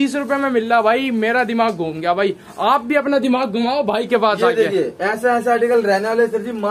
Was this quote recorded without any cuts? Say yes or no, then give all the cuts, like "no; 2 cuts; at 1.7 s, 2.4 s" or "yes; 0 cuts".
yes; 0 cuts